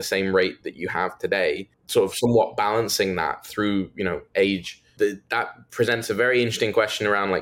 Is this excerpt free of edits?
no; 2 cuts; at 1.7 s, 4.8 s

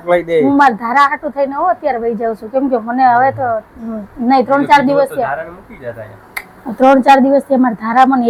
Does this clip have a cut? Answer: no; 0 cuts

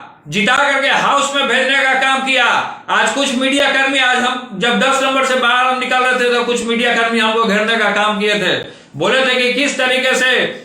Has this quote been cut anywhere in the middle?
no; 0 cuts

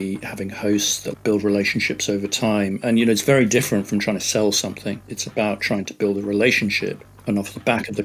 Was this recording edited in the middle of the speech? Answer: yes; 1 cut; at 1.2 s

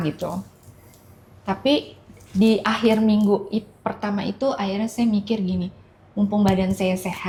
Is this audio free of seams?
yes; 0 cuts

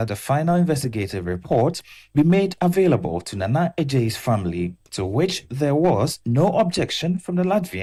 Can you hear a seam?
no; 0 cuts

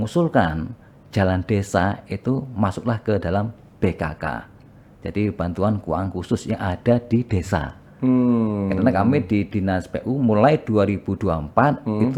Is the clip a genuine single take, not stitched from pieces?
yes; 0 cuts

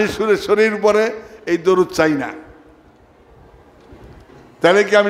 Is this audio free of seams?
yes; 0 cuts

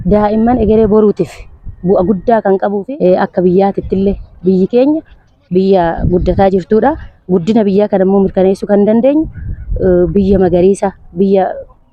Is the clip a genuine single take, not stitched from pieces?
yes; 0 cuts

